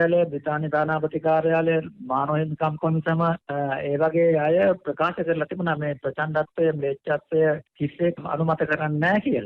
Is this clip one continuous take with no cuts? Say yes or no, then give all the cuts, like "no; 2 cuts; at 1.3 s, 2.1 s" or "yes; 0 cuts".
no; 2 cuts; at 3.4 s, 8.2 s